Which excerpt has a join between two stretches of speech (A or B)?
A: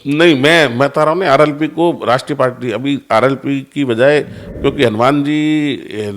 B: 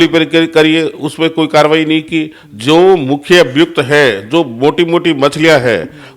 A